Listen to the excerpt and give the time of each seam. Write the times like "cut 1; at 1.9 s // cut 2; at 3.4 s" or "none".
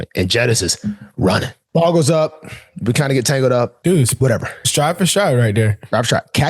cut 1; at 1.6 s // cut 2; at 3.8 s